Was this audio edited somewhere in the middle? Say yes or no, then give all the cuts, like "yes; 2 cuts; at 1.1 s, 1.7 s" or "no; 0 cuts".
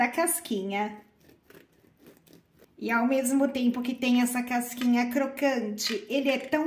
yes; 1 cut; at 2.7 s